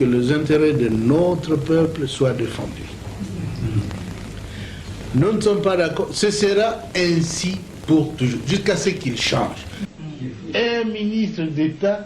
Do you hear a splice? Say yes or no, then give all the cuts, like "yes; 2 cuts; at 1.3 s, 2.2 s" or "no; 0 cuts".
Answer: yes; 1 cut; at 9.8 s